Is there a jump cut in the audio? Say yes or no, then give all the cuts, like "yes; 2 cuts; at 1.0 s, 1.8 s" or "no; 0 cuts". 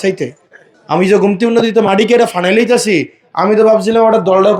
no; 0 cuts